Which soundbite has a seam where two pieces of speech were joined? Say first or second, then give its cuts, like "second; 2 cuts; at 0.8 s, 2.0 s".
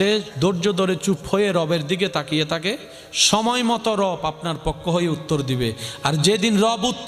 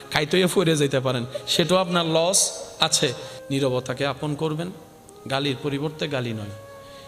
second; 1 cut; at 3.3 s